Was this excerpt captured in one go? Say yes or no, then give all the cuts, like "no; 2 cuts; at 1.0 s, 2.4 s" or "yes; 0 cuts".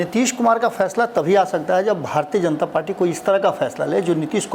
yes; 0 cuts